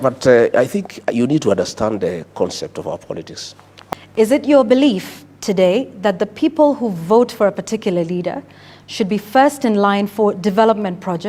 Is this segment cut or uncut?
cut